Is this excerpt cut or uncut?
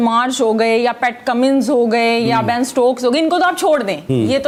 uncut